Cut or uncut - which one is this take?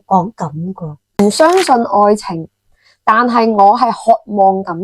cut